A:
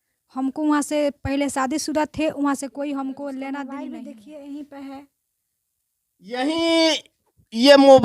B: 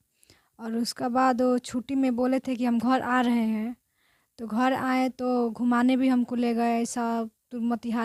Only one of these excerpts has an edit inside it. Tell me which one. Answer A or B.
A